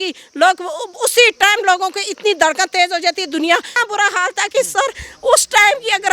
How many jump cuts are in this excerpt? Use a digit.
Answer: 1